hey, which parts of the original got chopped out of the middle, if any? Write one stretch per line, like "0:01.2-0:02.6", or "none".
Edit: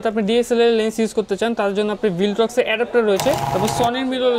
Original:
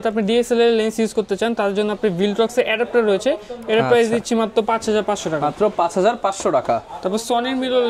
0:03.5-0:07.0